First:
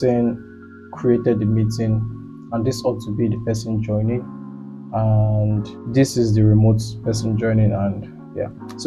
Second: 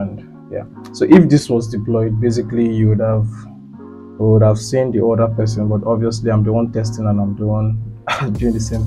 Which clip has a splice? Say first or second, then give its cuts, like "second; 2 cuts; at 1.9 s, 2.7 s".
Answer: first; 1 cut; at 5.8 s